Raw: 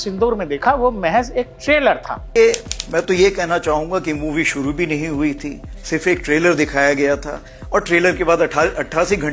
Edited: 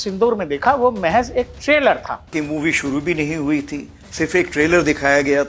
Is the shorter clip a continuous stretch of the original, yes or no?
no